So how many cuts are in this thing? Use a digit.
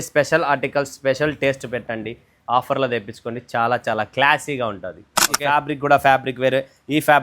1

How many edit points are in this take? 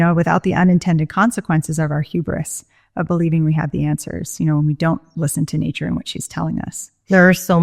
1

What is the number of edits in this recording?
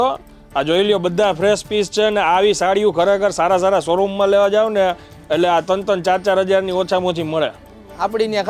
0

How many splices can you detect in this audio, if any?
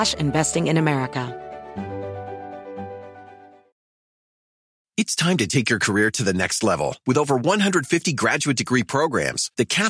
1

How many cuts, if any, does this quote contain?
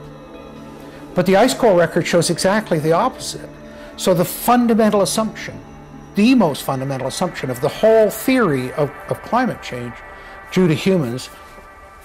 0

